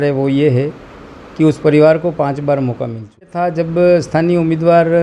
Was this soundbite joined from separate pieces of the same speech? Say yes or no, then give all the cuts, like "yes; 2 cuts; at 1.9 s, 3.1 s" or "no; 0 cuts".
yes; 1 cut; at 3.3 s